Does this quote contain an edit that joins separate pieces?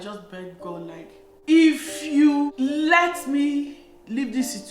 yes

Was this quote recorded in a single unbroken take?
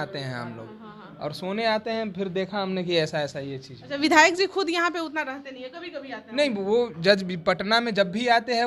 yes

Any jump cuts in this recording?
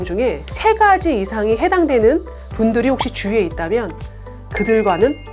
no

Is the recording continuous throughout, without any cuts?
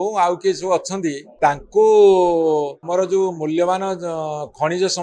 no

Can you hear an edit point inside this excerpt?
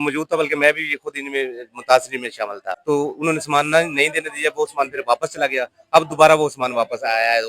yes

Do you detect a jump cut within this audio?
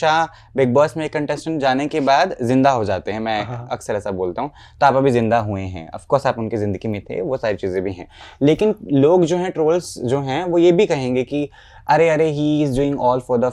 no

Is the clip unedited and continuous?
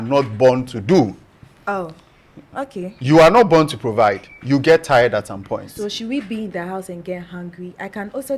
yes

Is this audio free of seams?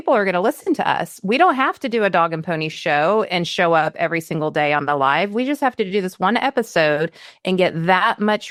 yes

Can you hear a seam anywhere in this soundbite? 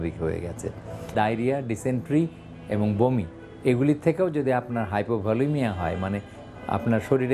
yes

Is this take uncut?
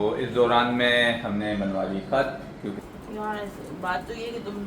no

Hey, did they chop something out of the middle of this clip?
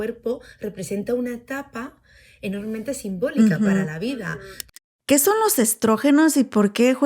yes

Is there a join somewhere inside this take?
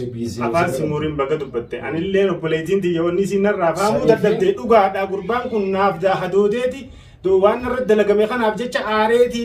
no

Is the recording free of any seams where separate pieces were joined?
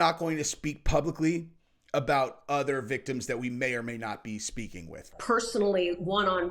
no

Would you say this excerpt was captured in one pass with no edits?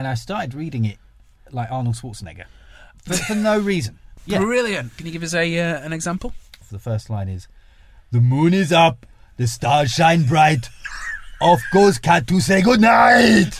no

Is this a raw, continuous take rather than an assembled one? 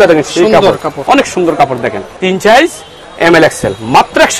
no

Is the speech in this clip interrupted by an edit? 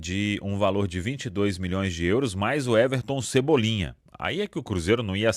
no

